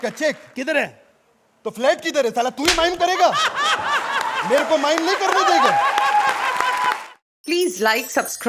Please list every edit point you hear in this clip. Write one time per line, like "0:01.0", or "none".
0:07.1